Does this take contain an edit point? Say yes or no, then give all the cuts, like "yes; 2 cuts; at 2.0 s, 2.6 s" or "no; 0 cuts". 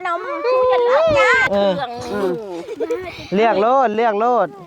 yes; 1 cut; at 1.4 s